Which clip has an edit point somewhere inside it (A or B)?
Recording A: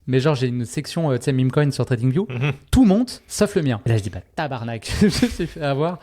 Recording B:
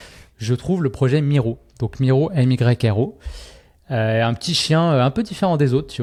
A